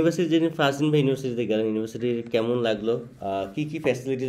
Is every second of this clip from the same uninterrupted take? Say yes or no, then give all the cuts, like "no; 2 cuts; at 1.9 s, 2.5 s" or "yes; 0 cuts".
yes; 0 cuts